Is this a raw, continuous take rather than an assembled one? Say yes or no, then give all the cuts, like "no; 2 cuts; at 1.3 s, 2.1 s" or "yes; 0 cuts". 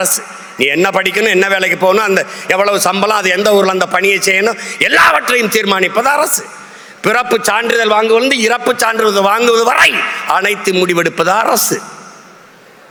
yes; 0 cuts